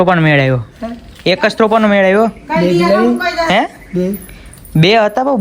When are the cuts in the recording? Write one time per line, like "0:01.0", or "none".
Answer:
none